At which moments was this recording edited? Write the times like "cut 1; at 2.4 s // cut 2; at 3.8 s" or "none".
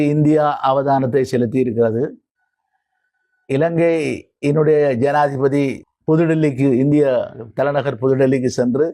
cut 1; at 5.9 s